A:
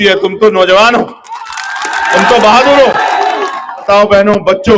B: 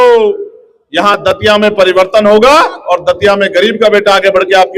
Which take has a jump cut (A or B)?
A